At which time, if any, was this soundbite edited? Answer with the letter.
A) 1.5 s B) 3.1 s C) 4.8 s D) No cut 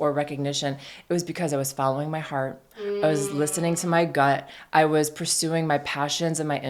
D